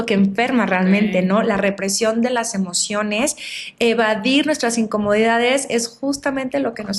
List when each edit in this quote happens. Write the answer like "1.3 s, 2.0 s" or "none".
none